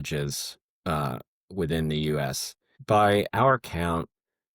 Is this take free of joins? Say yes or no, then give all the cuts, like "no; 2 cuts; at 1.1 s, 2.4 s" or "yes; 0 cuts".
no; 1 cut; at 2.8 s